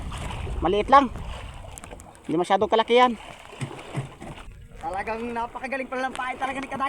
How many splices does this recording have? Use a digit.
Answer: 1